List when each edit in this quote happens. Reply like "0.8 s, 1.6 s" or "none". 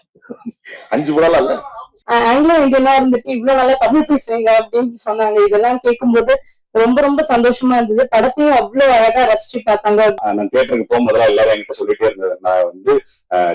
1.9 s, 10.2 s